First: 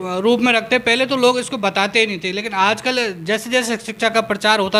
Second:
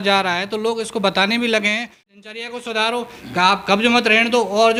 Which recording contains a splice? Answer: second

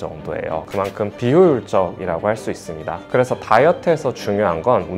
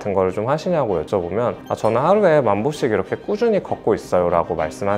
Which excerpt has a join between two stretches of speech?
first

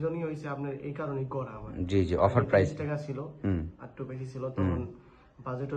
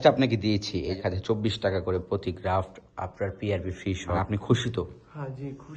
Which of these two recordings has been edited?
second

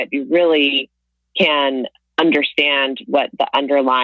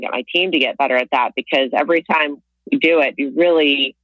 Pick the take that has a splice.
first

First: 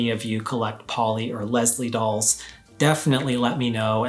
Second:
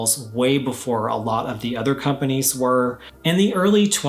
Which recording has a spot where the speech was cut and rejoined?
second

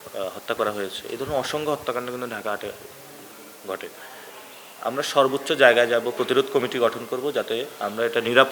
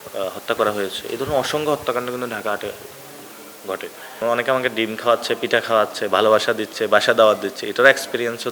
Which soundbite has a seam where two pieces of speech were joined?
second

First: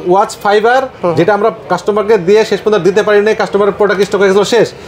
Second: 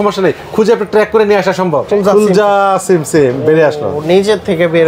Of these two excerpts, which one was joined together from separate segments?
second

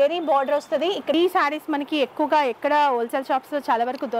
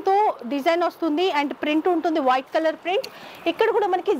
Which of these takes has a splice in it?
first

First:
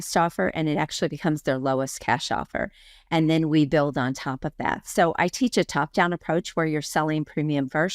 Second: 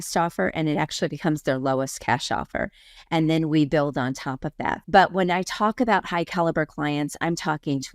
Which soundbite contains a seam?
second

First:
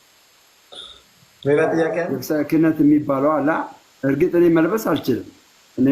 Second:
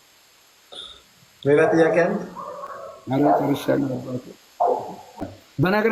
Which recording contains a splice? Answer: first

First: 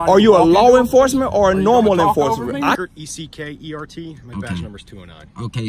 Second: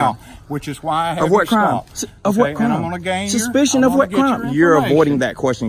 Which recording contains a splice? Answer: first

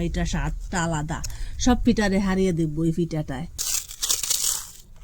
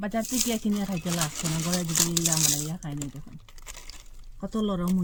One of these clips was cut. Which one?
first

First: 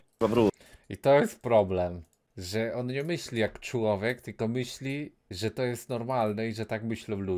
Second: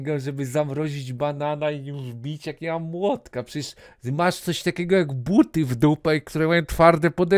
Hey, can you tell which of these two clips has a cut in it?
first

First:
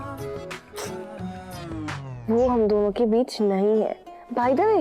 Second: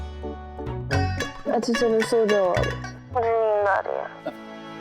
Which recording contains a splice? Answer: second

